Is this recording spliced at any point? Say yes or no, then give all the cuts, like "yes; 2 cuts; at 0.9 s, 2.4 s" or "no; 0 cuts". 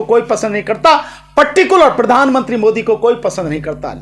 no; 0 cuts